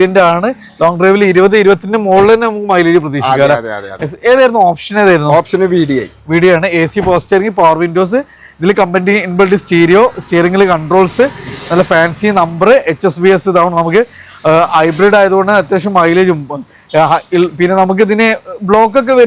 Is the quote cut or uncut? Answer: uncut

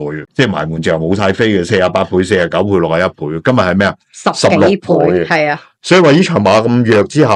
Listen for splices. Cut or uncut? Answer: uncut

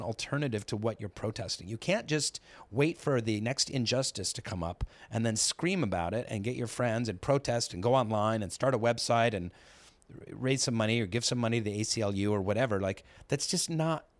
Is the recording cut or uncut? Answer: uncut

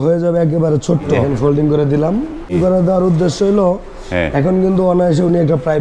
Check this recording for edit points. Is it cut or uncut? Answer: cut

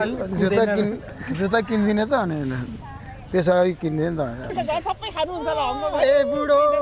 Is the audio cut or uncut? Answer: cut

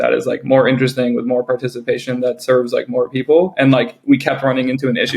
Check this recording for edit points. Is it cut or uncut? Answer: uncut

